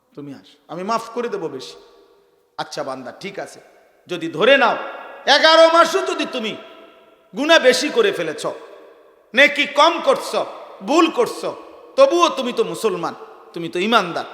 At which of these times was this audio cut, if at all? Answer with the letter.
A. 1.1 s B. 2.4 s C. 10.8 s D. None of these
B